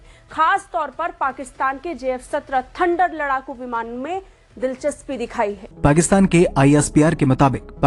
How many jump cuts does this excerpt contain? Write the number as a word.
one